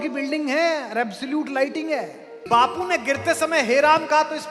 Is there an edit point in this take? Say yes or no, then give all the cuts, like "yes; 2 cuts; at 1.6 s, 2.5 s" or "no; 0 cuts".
yes; 1 cut; at 2.4 s